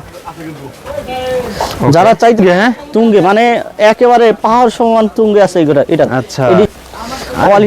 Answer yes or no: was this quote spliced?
yes